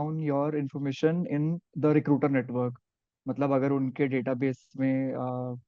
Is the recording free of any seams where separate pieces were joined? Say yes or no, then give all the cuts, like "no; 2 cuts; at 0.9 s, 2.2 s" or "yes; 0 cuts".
yes; 0 cuts